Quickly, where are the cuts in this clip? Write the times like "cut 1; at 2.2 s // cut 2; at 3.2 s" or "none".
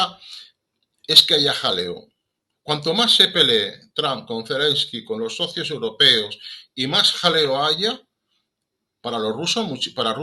none